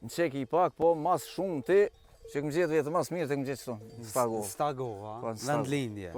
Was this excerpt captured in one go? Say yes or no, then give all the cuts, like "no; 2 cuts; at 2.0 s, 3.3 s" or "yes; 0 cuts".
yes; 0 cuts